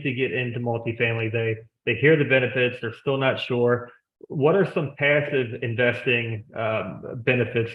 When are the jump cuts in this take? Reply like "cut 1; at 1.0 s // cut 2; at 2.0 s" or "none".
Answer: none